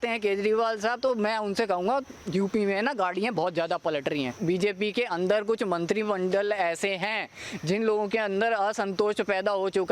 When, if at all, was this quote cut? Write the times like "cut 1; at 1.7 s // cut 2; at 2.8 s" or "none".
cut 1; at 4.3 s